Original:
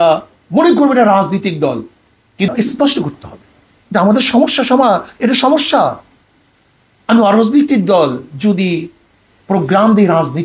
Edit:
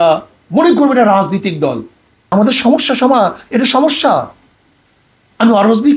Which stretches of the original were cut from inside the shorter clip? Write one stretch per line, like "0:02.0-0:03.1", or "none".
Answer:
0:02.3-0:04.0

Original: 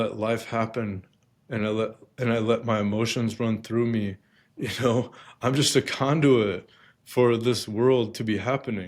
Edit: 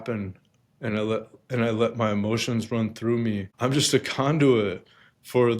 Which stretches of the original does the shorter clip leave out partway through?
0:04.2-0:05.3

